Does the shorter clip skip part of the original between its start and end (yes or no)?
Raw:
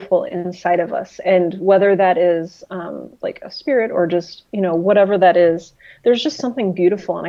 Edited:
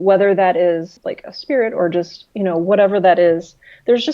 yes